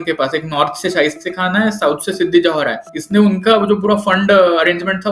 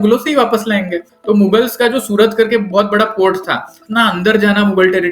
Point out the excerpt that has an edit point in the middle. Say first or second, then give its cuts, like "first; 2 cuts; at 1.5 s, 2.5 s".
second; 1 cut; at 3.8 s